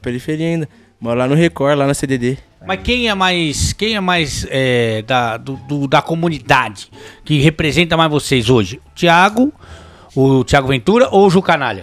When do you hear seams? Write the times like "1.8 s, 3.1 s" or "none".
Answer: none